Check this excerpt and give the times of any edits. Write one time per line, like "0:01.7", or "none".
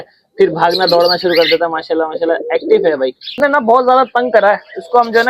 0:03.4